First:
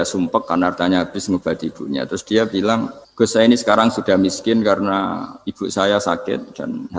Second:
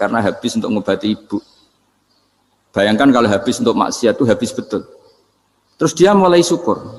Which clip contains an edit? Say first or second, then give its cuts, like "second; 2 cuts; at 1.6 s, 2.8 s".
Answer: first; 1 cut; at 3.0 s